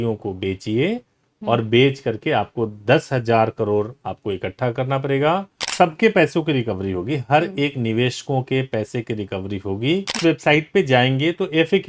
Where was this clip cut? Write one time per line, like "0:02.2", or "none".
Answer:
0:05.7
0:10.2

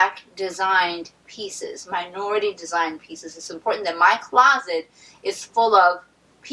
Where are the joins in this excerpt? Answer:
none

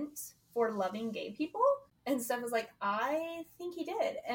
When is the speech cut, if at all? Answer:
none

